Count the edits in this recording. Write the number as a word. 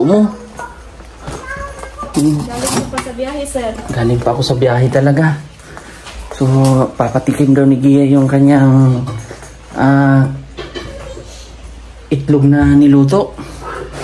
zero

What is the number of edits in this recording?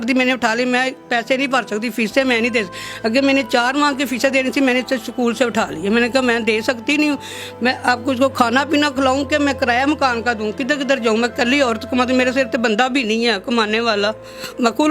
zero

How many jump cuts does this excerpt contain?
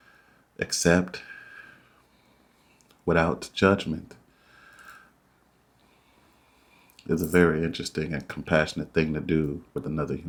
zero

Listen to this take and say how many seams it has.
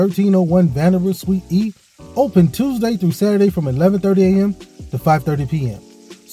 zero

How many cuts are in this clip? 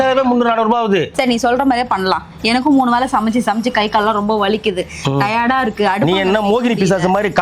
one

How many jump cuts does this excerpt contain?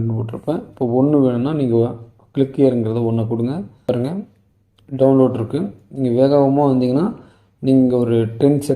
one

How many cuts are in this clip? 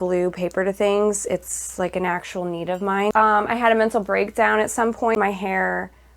two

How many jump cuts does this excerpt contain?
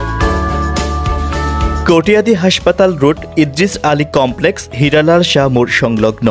one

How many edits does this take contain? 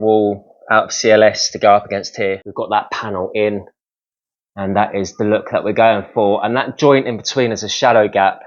one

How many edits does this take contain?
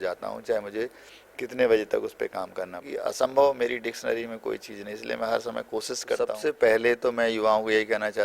two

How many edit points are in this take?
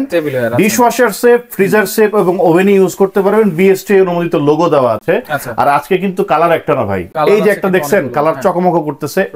zero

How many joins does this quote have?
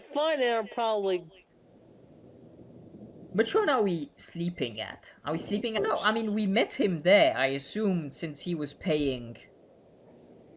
zero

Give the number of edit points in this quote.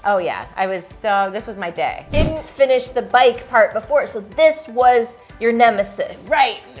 one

